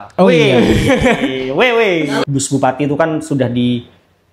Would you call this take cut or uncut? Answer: cut